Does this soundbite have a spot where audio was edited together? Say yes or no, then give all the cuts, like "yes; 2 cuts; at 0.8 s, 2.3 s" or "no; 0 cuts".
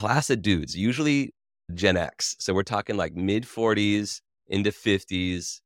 yes; 1 cut; at 1.7 s